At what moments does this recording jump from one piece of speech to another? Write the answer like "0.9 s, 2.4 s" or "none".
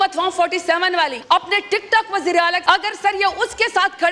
1.2 s, 2.6 s